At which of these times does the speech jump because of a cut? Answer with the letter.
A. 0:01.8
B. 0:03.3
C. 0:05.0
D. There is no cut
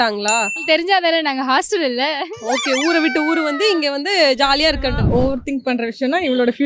C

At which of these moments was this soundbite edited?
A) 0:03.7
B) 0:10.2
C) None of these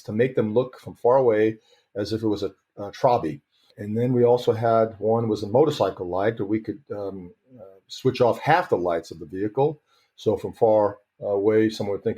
A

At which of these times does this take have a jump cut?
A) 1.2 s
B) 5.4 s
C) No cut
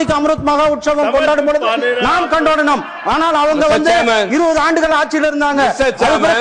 C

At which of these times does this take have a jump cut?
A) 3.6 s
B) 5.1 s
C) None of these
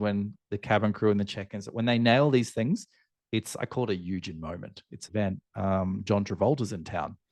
B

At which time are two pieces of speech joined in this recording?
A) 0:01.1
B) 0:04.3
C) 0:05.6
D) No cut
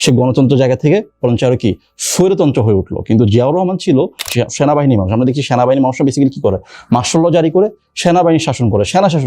B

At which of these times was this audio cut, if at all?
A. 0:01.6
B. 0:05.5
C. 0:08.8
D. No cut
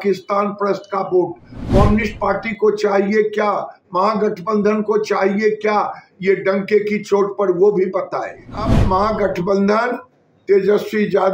C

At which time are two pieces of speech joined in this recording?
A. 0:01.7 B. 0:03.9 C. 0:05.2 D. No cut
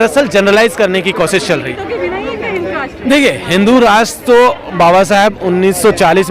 A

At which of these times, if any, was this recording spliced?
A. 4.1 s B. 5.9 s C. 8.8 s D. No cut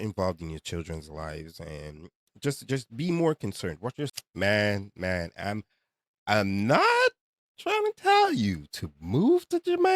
A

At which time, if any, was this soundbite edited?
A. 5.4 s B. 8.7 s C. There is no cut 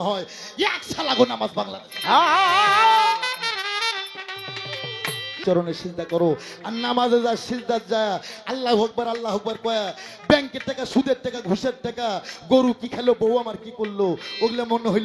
A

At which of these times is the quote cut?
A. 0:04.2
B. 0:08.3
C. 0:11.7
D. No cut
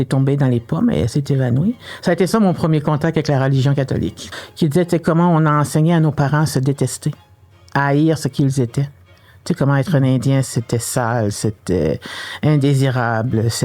A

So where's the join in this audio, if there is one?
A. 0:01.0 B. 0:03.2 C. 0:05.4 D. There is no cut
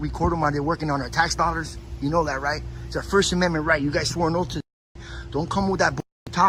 D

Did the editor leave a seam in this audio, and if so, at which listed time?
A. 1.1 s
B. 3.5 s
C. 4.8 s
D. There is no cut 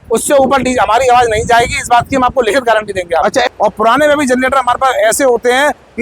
B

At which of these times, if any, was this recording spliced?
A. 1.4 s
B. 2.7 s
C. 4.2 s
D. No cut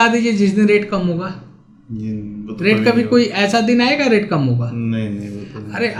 D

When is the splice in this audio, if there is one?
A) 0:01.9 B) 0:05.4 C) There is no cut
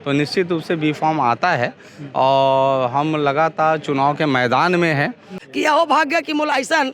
B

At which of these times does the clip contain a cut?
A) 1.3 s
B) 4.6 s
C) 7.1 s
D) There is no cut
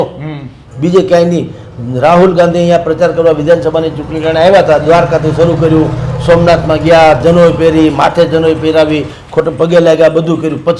D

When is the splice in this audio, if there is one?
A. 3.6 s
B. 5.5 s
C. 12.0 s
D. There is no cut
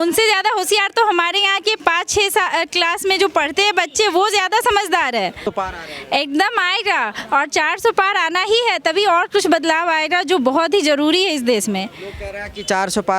B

